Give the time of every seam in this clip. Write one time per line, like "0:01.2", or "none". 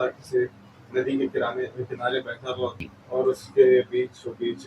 0:02.9